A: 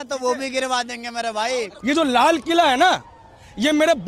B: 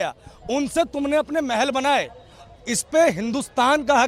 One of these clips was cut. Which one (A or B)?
A